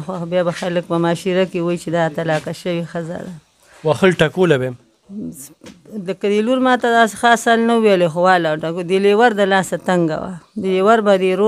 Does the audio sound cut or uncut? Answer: uncut